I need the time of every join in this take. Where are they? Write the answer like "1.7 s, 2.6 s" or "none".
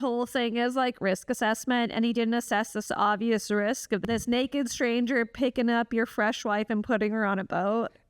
4.0 s

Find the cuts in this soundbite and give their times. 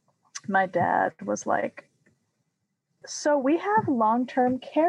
3.0 s

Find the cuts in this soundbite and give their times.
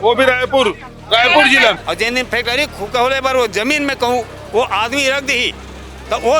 1.8 s

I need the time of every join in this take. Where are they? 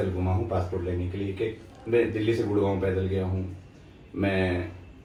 none

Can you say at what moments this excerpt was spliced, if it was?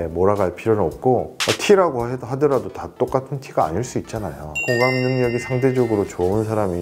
4.6 s

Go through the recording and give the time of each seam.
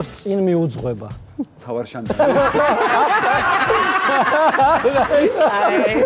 none

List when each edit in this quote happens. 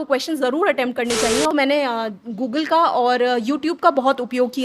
1.5 s

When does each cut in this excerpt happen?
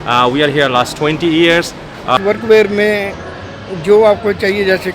2.2 s

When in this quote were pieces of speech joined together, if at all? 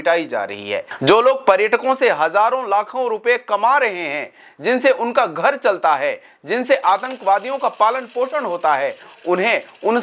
0.9 s

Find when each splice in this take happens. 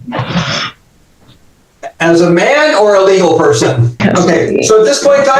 4.0 s

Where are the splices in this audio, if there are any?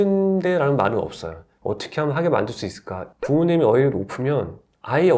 3.0 s

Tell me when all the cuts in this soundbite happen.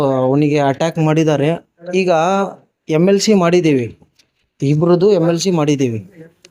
1.7 s

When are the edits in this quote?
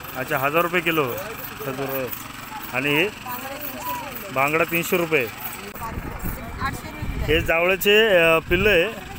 5.7 s

